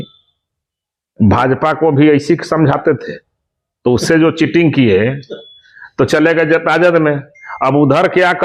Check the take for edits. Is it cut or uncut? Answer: uncut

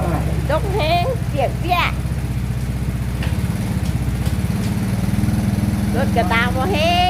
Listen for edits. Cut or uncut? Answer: uncut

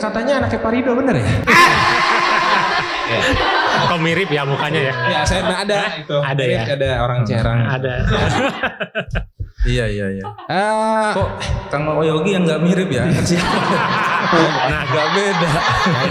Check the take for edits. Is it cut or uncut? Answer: uncut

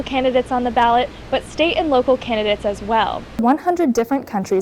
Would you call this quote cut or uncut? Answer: cut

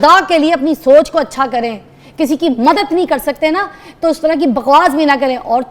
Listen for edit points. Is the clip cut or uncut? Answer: uncut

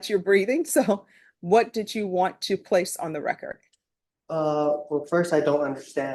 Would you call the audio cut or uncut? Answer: uncut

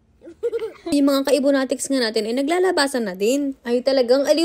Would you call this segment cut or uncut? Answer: cut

